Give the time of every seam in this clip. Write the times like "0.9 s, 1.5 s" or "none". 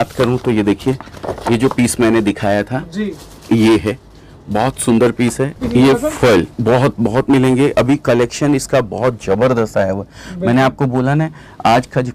5.6 s

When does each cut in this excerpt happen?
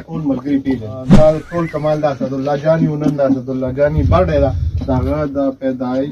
1.0 s

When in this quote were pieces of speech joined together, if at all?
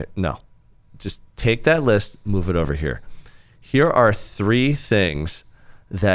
none

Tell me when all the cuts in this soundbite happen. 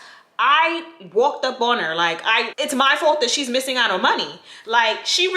2.5 s

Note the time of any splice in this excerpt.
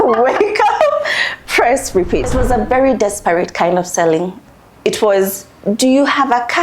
2.3 s, 4.4 s

